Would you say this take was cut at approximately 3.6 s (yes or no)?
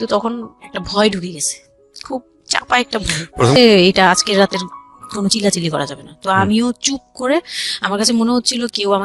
yes